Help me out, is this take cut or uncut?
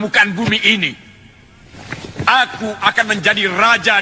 uncut